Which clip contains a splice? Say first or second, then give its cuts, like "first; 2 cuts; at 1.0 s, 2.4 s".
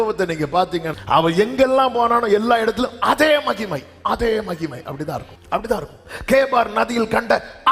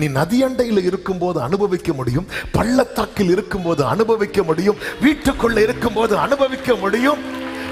first; 2 cuts; at 0.9 s, 5.3 s